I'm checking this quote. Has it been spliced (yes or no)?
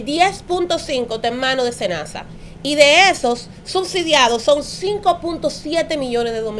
no